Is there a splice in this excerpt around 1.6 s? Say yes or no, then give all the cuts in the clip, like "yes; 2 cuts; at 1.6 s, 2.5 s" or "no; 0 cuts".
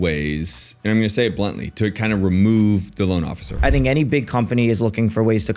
no; 1 cut; at 3.5 s